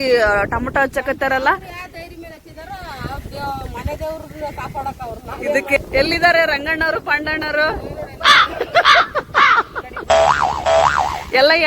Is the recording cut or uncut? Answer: cut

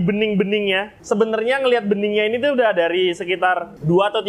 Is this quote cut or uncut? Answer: cut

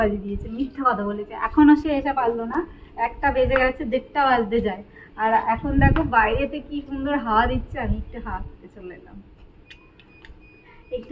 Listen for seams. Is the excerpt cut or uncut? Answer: uncut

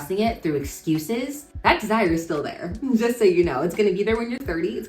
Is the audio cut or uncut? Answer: cut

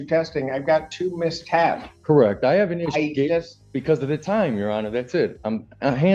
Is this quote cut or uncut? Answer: uncut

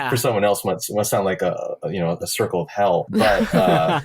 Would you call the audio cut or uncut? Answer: cut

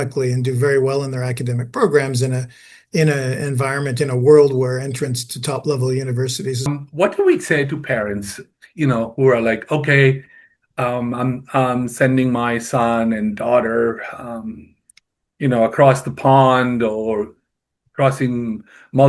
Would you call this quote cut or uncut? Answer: cut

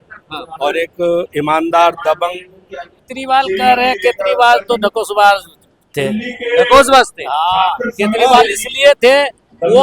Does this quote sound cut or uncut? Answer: cut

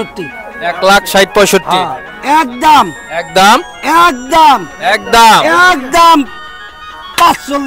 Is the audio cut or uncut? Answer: uncut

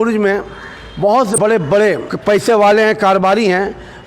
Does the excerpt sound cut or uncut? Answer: cut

